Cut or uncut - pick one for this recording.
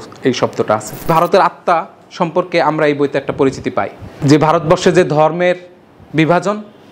cut